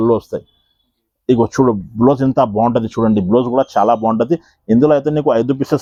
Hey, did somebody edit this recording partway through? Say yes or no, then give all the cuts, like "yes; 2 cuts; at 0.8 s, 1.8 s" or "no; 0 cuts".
no; 0 cuts